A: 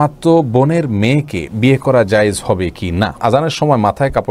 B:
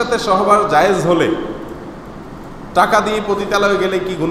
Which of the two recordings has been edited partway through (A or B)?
A